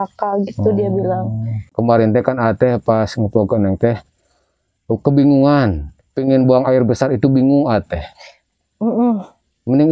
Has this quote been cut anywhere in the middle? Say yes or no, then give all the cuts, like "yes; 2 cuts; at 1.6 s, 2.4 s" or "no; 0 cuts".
yes; 1 cut; at 1.7 s